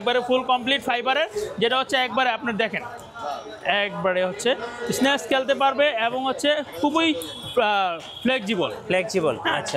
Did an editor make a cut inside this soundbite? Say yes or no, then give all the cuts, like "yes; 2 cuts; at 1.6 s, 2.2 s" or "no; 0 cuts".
no; 0 cuts